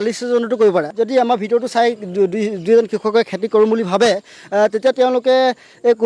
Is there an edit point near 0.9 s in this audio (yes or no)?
yes